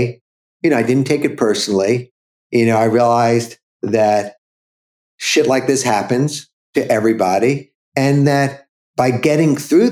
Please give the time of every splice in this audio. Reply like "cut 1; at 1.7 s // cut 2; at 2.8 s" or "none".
none